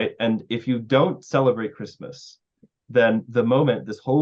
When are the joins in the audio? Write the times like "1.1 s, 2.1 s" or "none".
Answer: none